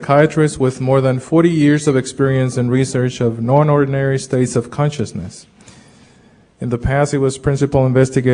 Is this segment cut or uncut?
uncut